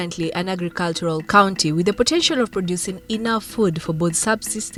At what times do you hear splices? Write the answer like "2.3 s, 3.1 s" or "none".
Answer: none